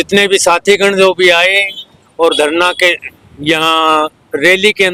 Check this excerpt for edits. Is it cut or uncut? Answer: uncut